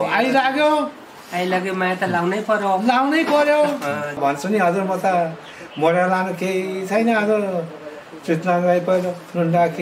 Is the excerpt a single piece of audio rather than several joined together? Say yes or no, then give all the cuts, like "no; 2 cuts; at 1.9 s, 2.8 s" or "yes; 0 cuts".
no; 1 cut; at 4.2 s